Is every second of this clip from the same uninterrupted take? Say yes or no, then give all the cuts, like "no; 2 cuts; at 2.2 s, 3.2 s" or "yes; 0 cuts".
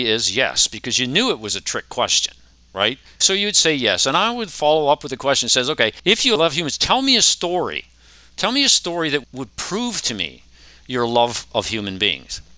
no; 3 cuts; at 3.2 s, 6.1 s, 9.3 s